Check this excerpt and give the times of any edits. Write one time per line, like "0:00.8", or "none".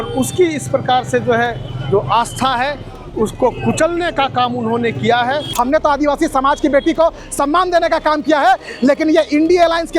0:05.5